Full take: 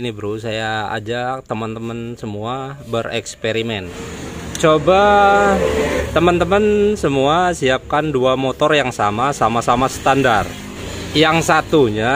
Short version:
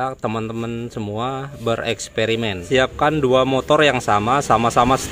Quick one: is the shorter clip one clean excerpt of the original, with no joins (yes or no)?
no